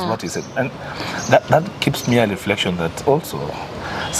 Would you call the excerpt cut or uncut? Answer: uncut